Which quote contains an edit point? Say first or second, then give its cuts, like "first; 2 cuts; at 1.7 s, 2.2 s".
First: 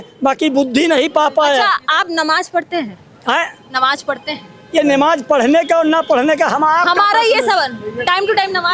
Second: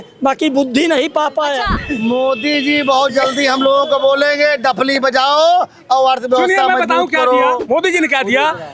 second; 2 cuts; at 1.8 s, 7.6 s